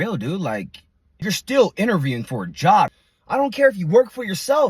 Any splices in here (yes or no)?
yes